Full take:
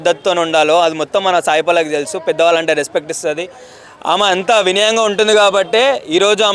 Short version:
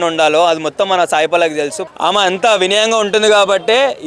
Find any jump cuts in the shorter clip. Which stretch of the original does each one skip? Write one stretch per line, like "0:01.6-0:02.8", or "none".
0:02.1-0:03.8